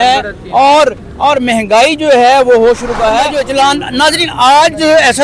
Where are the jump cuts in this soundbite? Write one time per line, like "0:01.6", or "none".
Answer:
0:03.4